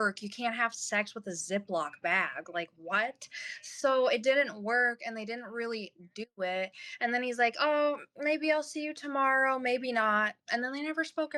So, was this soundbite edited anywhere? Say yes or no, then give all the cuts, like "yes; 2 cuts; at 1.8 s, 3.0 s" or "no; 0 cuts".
no; 0 cuts